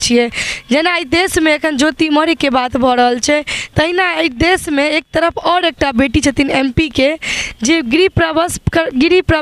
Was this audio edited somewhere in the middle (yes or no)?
no